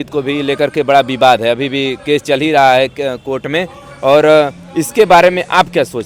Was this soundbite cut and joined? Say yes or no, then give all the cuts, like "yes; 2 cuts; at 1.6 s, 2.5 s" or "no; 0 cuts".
no; 0 cuts